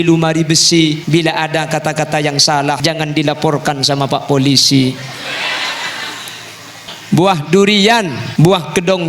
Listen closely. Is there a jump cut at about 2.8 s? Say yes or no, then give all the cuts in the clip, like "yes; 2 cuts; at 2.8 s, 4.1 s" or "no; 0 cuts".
yes; 4 cuts; at 1.0 s, 2.8 s, 6.9 s, 8.2 s